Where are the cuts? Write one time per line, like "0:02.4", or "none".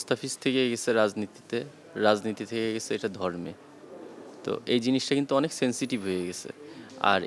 none